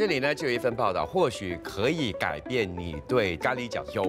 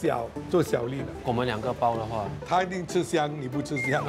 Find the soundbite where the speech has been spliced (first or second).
second